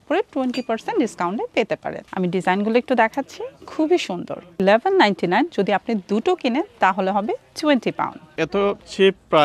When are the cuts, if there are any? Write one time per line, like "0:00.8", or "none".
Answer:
0:02.0
0:04.6
0:08.3